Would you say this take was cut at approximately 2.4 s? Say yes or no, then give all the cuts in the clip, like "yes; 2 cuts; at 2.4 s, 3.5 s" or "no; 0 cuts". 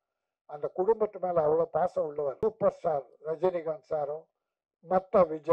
yes; 1 cut; at 2.4 s